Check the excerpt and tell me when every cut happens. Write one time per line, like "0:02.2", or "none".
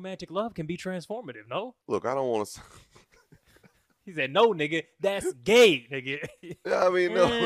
0:01.8